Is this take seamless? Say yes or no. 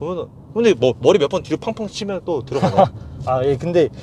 yes